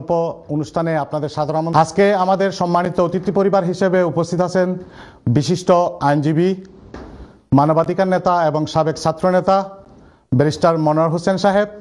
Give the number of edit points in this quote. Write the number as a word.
one